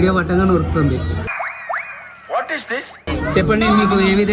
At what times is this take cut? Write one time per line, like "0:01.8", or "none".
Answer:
0:03.1